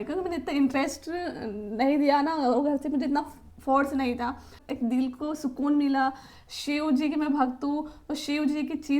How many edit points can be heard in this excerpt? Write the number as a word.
one